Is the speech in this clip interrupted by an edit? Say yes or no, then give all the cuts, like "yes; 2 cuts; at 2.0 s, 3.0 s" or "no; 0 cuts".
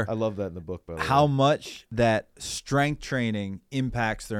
yes; 1 cut; at 1.8 s